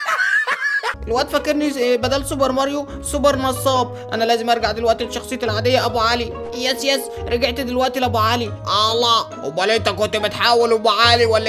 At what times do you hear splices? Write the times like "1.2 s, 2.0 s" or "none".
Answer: 1.0 s